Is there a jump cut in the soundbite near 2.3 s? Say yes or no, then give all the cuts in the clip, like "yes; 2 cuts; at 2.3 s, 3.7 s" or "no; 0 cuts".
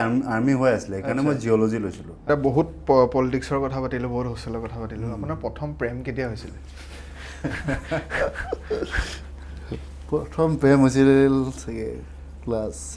yes; 1 cut; at 2.3 s